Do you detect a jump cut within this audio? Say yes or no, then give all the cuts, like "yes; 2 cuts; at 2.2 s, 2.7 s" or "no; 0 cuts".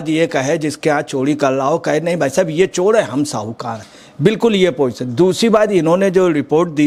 no; 0 cuts